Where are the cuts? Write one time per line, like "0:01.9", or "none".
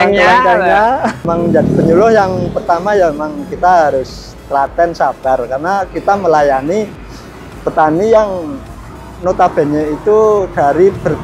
0:01.2